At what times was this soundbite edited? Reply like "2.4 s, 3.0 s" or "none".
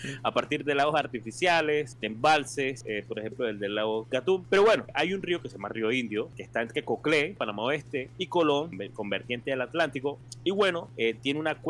2.0 s, 2.8 s, 4.2 s, 4.9 s, 6.4 s, 7.7 s, 8.8 s, 10.3 s, 10.9 s

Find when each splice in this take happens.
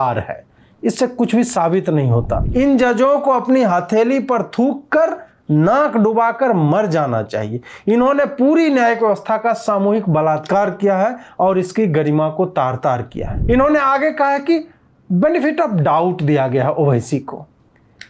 2.4 s, 13.3 s

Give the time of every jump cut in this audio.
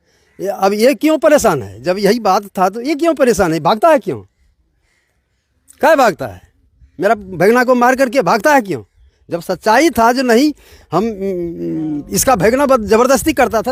none

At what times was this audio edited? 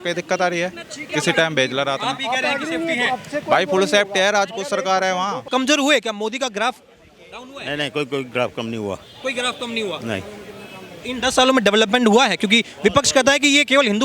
5.4 s

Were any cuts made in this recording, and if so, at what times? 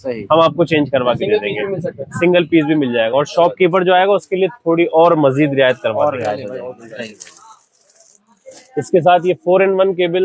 none

